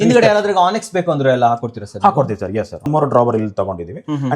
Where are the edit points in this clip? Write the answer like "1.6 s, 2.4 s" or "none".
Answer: 2.9 s